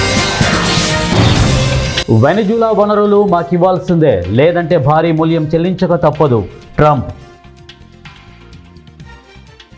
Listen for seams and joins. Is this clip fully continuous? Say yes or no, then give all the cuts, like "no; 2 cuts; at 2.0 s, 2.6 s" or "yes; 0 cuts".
yes; 0 cuts